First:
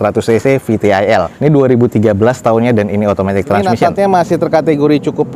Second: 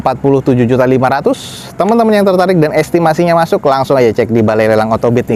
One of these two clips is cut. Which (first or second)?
first